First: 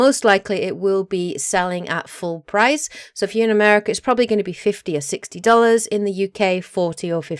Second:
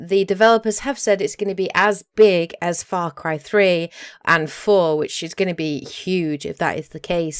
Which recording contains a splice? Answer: first; 1 cut; at 1.1 s

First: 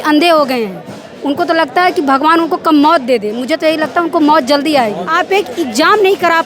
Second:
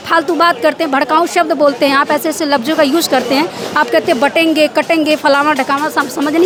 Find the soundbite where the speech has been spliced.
first; 1 cut; at 5.1 s

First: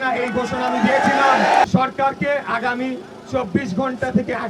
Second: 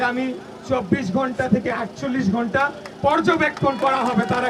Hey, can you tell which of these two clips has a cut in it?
first; 1 cut; at 1.6 s

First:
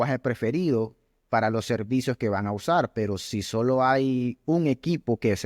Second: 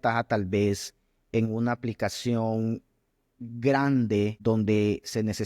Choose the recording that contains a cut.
second; 1 cut; at 4.3 s

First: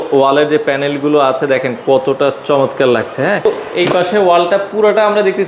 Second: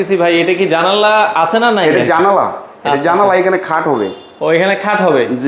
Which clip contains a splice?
first; 1 cut; at 3.5 s

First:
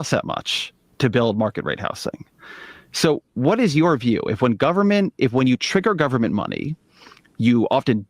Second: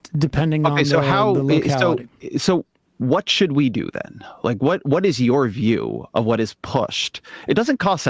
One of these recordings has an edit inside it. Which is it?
first; 1 cut; at 1.8 s

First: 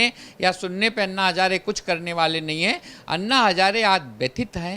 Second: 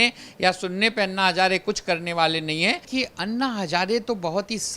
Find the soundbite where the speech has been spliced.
second; 1 cut; at 2.9 s

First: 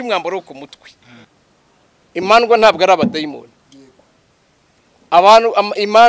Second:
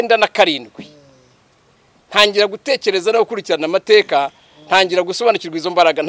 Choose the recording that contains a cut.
first; 1 cut; at 1.3 s

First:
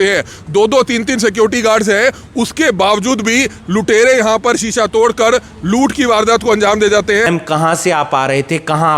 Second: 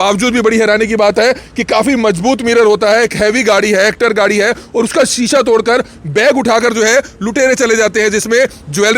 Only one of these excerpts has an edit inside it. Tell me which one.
first; 1 cut; at 7.3 s

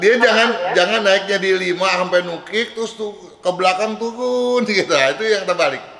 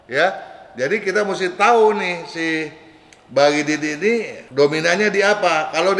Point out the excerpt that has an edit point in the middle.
second; 1 cut; at 4.4 s

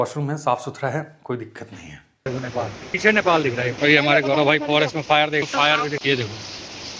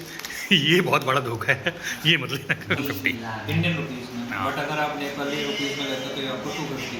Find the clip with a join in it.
first; 3 cuts; at 2.3 s, 3.7 s, 5.5 s

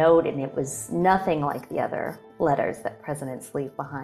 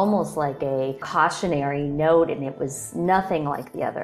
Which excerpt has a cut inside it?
second; 1 cut; at 1.0 s

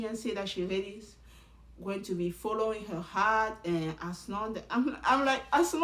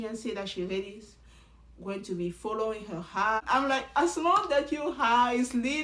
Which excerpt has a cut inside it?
second; 1 cut; at 3.4 s

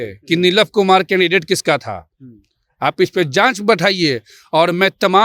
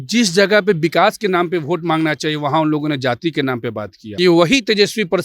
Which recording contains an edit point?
second; 1 cut; at 4.0 s

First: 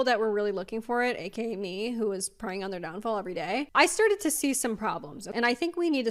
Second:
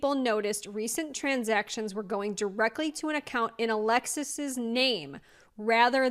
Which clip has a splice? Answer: first; 2 cuts; at 3.7 s, 5.2 s

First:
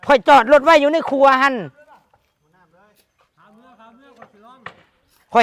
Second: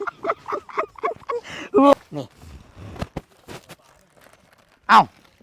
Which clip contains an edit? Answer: second; 1 cut; at 1.9 s

